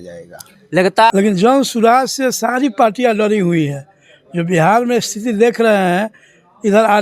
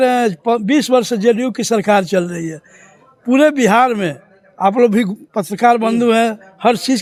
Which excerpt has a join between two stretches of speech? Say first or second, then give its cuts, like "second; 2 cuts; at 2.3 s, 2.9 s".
first; 1 cut; at 1.1 s